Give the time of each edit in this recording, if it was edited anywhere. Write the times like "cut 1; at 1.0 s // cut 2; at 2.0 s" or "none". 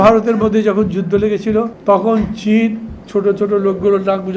cut 1; at 1.7 s